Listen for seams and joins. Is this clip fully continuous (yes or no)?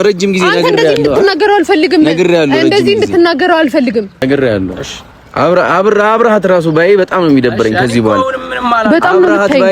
no